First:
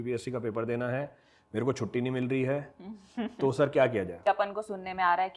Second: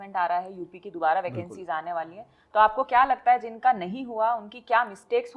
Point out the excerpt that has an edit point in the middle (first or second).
first